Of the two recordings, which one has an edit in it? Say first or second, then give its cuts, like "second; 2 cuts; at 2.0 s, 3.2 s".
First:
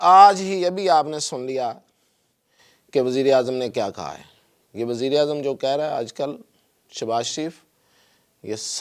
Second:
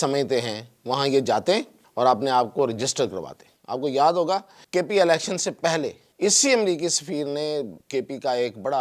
second; 4 cuts; at 1.8 s, 4.6 s, 6.0 s, 7.8 s